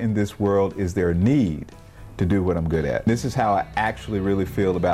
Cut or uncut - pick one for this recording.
cut